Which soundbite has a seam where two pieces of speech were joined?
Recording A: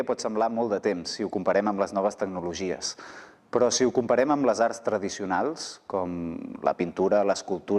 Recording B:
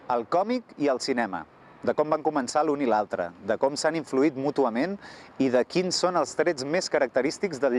A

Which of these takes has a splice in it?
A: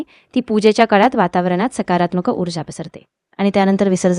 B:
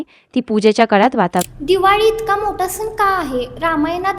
B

